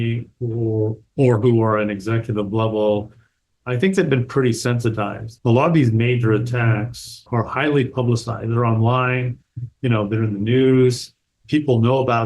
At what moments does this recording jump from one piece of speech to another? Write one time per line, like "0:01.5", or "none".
0:05.2